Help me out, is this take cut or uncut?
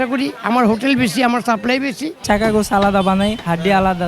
cut